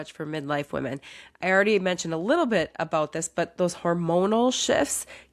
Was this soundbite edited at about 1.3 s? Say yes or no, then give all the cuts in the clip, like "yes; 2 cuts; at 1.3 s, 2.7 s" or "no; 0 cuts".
no; 0 cuts